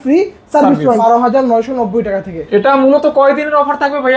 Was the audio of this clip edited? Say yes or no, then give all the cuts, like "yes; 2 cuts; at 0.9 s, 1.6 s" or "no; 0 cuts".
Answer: yes; 1 cut; at 1.0 s